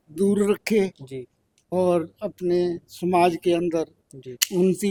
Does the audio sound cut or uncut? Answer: uncut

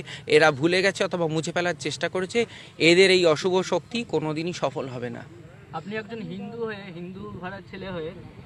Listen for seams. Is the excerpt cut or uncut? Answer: uncut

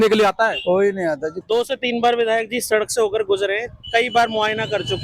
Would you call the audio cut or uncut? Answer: cut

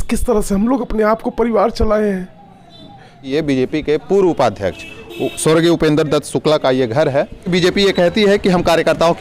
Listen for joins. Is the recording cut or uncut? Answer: cut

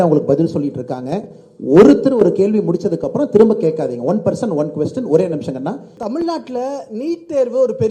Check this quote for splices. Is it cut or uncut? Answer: cut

